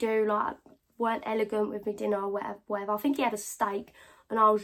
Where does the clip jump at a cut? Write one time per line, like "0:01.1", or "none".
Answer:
none

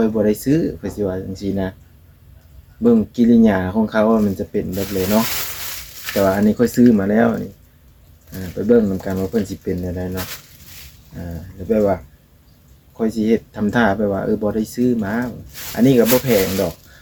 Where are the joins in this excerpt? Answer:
none

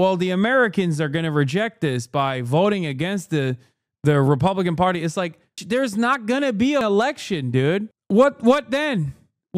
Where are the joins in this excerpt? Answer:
0:05.6
0:06.8

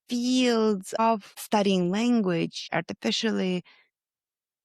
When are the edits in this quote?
0:00.9
0:02.6

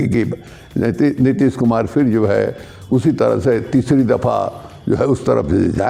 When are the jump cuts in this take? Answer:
none

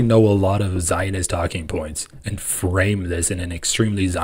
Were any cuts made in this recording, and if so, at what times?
none

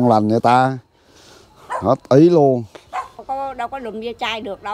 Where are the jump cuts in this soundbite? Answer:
0:03.1

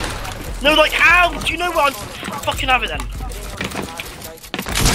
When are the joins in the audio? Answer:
0:03.6

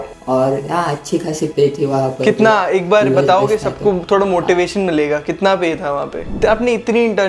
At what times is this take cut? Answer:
0:06.3

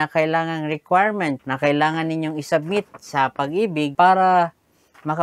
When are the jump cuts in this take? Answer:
0:01.5
0:03.9

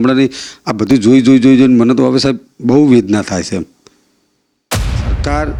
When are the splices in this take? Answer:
none

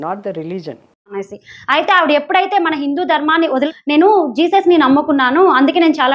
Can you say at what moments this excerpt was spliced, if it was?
none

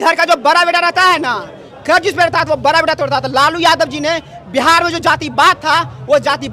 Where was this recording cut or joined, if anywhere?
none

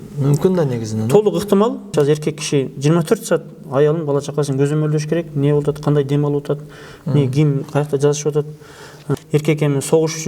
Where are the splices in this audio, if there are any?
0:01.9
0:09.0

